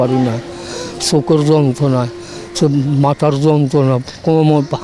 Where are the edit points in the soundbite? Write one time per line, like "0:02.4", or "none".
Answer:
none